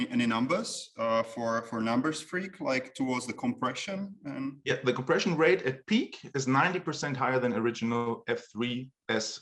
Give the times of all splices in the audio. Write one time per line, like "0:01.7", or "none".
none